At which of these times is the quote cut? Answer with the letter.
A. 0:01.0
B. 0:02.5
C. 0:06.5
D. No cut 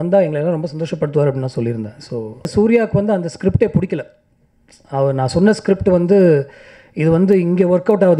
B